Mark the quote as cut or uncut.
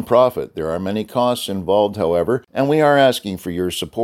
cut